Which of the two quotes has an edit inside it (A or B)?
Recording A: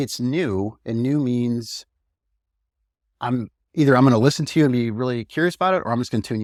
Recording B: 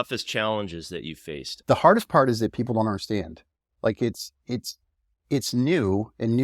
B